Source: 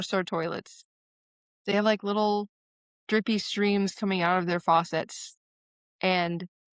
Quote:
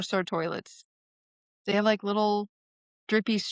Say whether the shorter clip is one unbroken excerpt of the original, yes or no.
yes